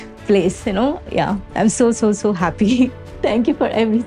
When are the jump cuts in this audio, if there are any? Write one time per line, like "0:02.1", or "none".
0:01.0
0:03.2